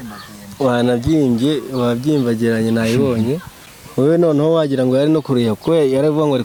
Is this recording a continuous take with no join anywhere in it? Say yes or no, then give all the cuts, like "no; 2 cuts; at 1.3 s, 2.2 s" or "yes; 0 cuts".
yes; 0 cuts